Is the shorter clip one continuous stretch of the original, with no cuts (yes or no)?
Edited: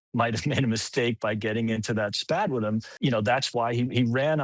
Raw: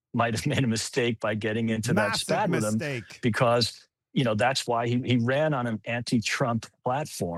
no